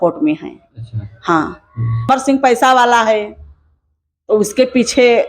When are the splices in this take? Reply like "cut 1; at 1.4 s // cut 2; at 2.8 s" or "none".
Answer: cut 1; at 2.1 s